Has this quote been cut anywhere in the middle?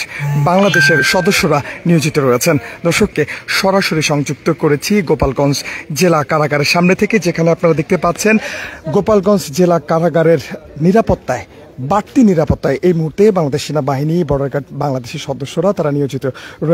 yes; 1 cut; at 3.1 s

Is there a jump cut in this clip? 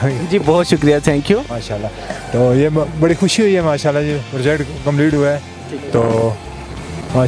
no; 0 cuts

